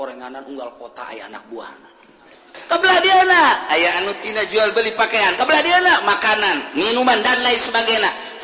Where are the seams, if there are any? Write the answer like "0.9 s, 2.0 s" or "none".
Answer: 2.5 s